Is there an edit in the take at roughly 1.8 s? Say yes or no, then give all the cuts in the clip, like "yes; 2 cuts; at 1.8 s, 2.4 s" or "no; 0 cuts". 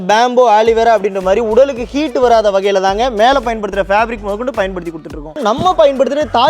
no; 1 cut; at 5.4 s